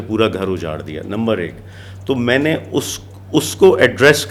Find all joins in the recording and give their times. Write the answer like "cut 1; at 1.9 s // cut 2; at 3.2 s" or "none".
none